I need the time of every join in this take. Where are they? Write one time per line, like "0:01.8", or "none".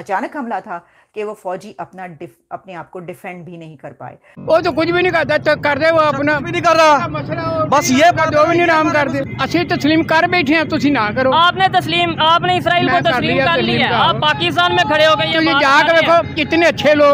0:04.3